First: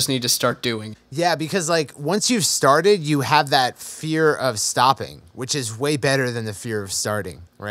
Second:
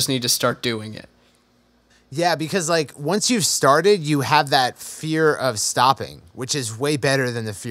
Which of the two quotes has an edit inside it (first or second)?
first